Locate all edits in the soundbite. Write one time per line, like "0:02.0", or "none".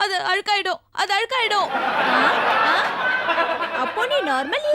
none

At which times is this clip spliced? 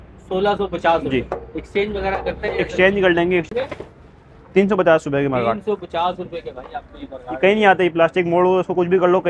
0:03.5

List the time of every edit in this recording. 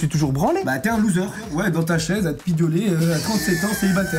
0:01.5

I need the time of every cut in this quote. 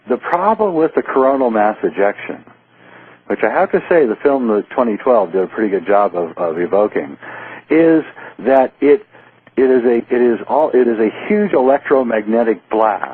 0:06.8

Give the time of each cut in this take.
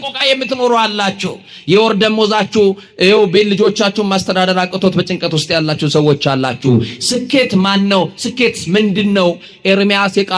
none

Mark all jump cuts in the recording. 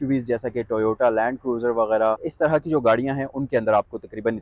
0:02.3

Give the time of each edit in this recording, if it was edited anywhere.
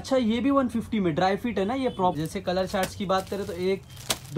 0:02.1

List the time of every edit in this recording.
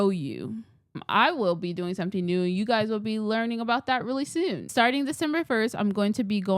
0:01.0
0:04.7

